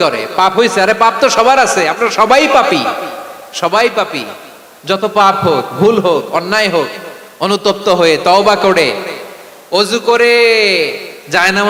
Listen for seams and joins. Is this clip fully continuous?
yes; 0 cuts

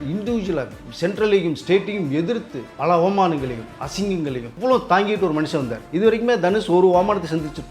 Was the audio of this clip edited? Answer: yes; 3 cuts; at 2.7 s, 4.5 s, 5.8 s

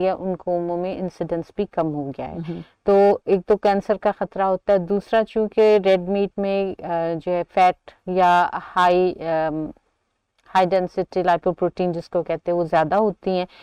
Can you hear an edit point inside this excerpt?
no; 0 cuts

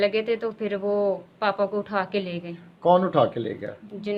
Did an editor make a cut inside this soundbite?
no; 0 cuts

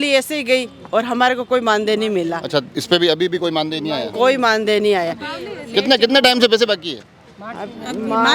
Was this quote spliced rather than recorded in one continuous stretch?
no; 0 cuts

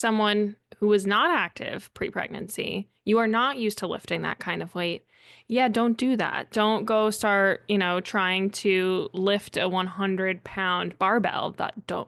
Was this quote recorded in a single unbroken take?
yes; 0 cuts

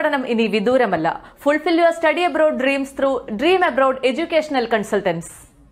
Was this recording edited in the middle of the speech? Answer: no; 0 cuts

